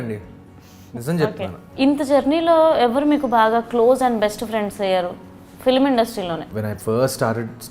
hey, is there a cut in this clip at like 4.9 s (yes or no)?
no